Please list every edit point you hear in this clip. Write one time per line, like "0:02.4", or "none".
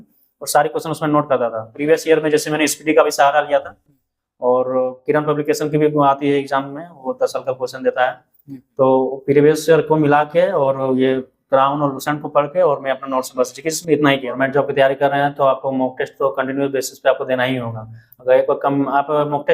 0:01.7
0:14.3